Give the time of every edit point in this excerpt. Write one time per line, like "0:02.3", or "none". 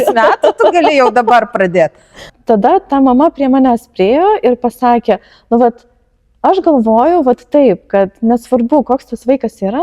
0:02.3